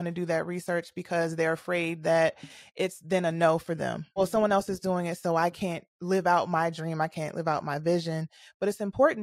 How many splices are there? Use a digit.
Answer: 1